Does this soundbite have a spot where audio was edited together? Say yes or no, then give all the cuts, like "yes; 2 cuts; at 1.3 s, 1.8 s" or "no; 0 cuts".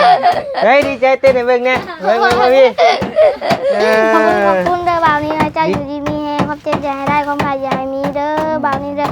yes; 1 cut; at 4.6 s